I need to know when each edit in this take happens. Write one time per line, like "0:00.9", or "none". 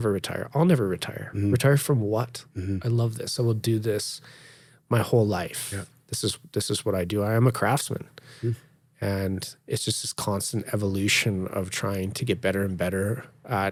none

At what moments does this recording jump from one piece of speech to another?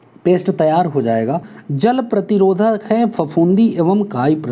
0:01.5

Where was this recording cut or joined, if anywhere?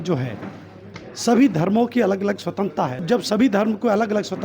0:03.0

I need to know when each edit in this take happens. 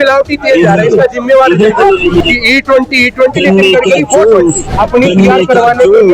0:02.2
0:04.7

